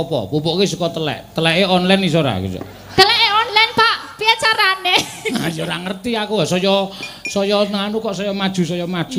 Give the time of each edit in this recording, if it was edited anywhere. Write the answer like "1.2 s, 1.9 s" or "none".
none